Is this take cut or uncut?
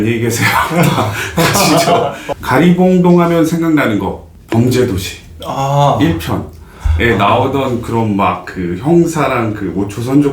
cut